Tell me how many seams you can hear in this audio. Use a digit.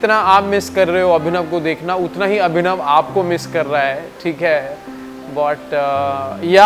0